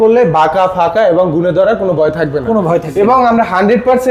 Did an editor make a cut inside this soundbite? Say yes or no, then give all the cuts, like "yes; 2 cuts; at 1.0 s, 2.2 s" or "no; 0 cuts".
no; 0 cuts